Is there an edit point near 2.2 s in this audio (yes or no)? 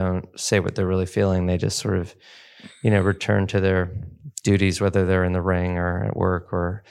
no